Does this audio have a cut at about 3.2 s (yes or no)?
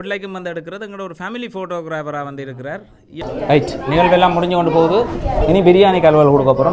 yes